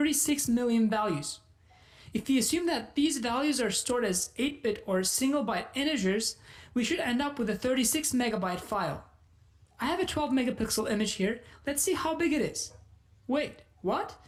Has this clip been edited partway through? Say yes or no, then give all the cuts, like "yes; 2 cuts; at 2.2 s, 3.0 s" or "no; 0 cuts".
no; 0 cuts